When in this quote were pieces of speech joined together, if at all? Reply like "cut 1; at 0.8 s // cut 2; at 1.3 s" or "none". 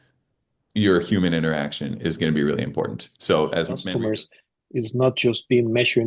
cut 1; at 3.8 s